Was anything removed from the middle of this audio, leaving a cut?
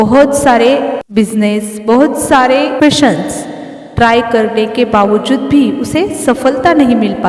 yes; 2 cuts; at 1.0 s, 2.8 s

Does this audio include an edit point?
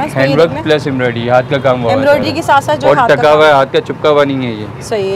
no; 0 cuts

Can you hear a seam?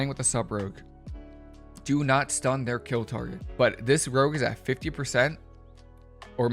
yes; 1 cut; at 3.4 s

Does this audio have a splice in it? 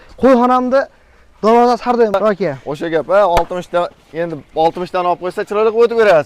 yes; 1 cut; at 2.2 s

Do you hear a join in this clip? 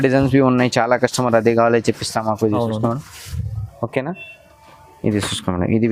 no; 0 cuts

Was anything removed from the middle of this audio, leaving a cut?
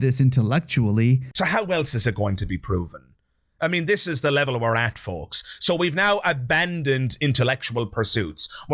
yes; 1 cut; at 1.2 s

